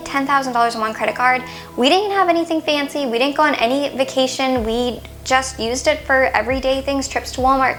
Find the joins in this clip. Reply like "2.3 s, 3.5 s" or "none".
none